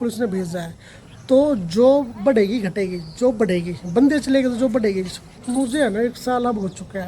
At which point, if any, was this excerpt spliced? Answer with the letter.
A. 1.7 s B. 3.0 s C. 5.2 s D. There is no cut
C